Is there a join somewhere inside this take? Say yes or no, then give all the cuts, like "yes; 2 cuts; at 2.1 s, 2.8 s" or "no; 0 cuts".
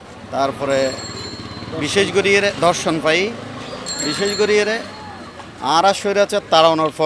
no; 0 cuts